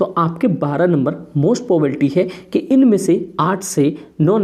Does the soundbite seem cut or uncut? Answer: uncut